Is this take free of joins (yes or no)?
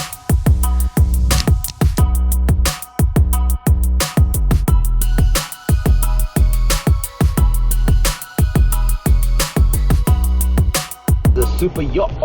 no